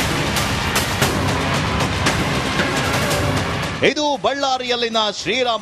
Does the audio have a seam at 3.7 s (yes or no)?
no